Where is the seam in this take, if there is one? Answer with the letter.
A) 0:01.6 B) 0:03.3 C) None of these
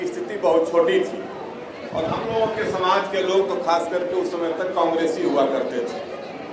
C